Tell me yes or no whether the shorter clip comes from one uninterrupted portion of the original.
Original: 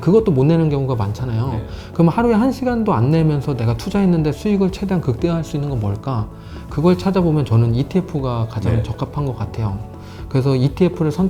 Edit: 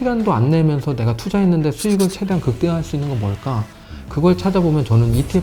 yes